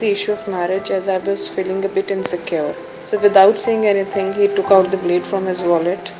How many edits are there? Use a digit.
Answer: 1